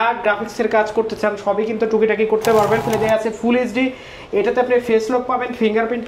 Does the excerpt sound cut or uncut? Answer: cut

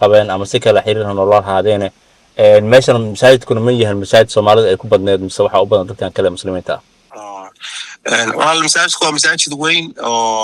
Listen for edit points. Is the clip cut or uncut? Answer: uncut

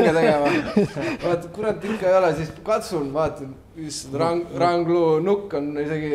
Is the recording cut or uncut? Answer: uncut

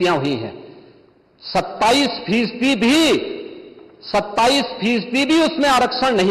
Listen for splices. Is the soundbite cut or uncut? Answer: uncut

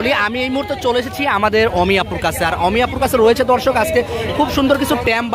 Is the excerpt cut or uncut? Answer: uncut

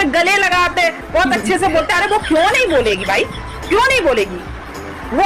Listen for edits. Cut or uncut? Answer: uncut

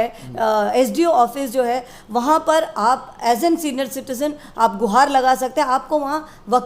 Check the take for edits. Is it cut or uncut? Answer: uncut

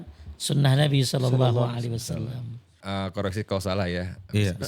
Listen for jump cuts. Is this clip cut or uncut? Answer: cut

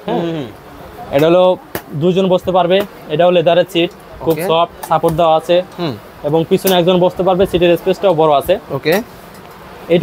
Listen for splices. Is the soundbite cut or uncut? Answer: uncut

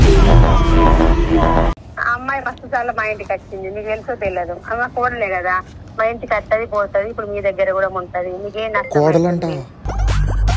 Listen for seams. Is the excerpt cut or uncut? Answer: cut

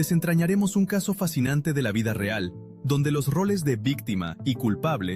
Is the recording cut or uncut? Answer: uncut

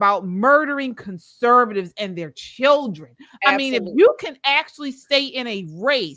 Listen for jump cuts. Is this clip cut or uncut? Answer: uncut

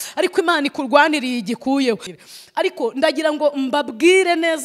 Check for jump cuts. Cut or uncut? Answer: cut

